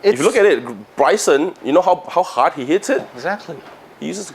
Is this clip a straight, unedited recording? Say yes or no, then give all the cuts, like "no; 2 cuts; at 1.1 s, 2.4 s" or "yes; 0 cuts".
yes; 0 cuts